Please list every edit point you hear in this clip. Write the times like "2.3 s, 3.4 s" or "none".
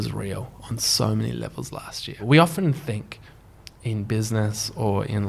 2.2 s